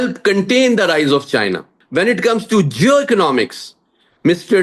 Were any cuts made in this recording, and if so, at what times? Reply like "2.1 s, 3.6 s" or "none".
1.7 s